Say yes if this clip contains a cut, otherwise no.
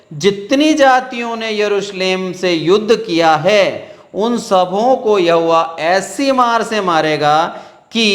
no